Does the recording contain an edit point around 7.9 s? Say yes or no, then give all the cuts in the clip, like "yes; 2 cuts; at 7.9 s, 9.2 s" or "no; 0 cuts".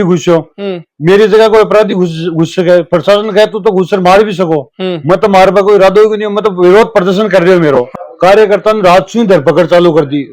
yes; 1 cut; at 7.9 s